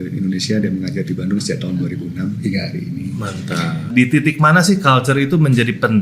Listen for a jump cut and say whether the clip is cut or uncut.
cut